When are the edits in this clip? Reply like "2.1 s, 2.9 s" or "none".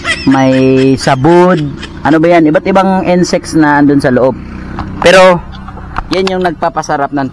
none